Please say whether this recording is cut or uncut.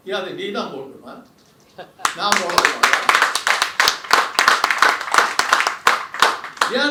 uncut